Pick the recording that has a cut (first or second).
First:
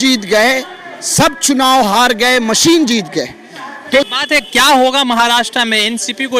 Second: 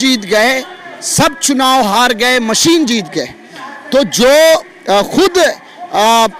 first